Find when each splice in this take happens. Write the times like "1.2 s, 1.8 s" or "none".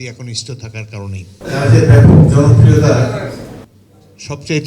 1.3 s